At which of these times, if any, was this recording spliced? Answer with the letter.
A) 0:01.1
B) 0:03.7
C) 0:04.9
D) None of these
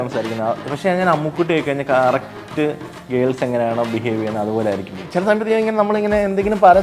C